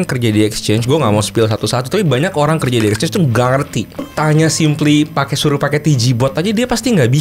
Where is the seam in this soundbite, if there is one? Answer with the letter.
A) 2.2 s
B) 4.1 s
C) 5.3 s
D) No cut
B